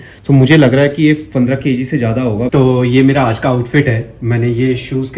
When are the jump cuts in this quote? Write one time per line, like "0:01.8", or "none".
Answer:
0:02.5